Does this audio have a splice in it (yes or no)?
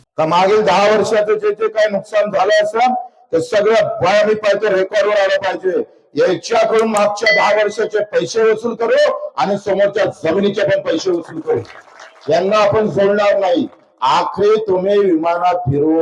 no